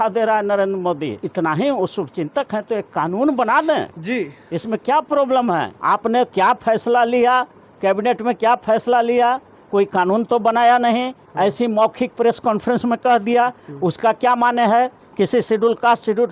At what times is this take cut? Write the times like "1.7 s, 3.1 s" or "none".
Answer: 1.2 s, 5.7 s